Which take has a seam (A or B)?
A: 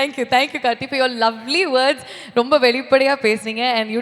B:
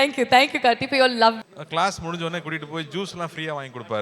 B